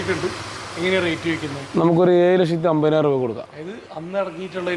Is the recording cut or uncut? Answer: uncut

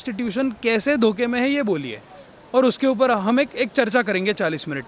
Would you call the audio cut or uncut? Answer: uncut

